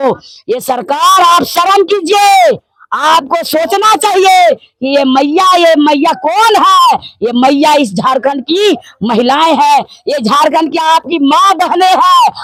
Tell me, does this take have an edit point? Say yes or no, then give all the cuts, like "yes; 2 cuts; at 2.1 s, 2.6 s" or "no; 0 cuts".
no; 0 cuts